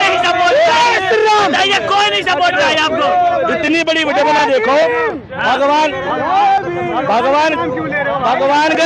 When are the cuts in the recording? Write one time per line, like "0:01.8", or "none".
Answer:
none